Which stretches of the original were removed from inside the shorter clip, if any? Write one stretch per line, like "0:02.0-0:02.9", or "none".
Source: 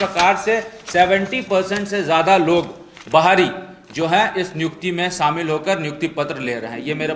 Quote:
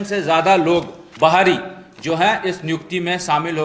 0:02.8-0:02.9

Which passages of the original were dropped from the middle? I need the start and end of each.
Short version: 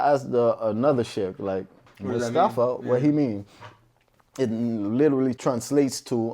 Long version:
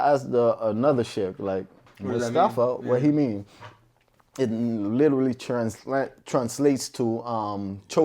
0:05.4-0:06.3

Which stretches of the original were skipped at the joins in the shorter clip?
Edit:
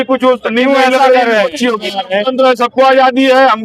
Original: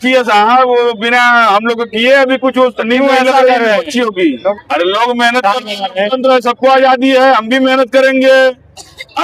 0:04.1-0:05.7

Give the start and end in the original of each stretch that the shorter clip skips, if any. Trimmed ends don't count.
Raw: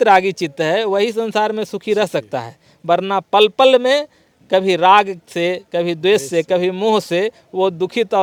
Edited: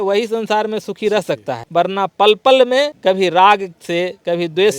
0:02.4-0:02.7
0:04.1-0:04.4

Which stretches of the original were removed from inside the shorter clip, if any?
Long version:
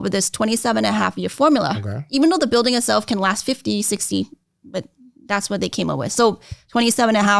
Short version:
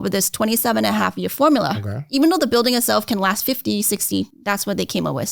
0:04.3-0:05.2

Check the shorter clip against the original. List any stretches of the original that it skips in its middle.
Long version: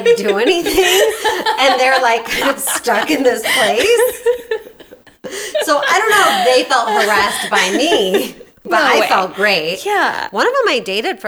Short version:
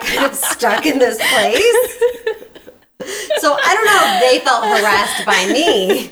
none

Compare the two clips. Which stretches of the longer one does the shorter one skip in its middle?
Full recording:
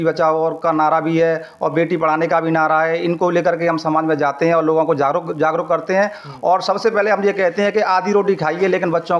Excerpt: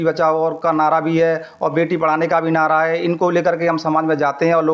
none

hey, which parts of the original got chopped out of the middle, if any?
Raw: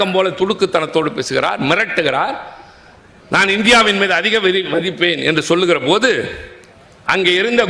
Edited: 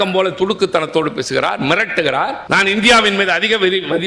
0:02.4-0:03.2

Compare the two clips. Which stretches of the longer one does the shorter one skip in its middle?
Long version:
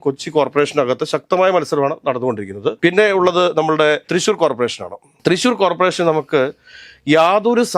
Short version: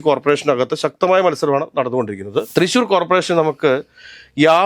0:02.8-0:05.2

